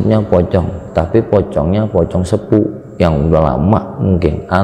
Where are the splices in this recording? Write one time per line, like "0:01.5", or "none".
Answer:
none